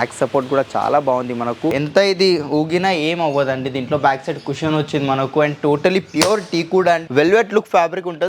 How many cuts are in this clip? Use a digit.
2